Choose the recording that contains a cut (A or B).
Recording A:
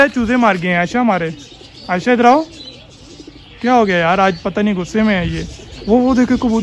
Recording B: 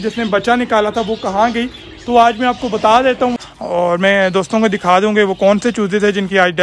B